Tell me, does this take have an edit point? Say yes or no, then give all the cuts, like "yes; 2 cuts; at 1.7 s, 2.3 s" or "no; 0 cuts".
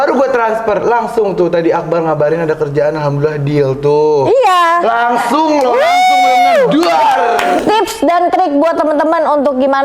yes; 1 cut; at 7.6 s